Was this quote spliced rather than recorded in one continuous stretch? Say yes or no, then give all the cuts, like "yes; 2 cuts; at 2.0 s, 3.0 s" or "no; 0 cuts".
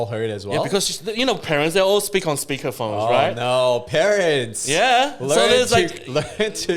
no; 0 cuts